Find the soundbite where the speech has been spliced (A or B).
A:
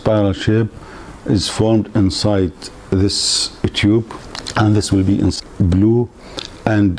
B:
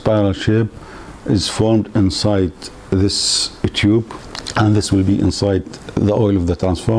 A